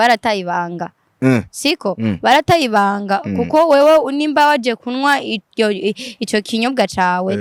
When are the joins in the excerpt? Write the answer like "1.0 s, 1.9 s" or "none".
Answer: none